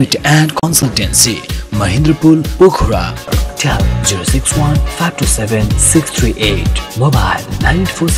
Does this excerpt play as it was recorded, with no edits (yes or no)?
yes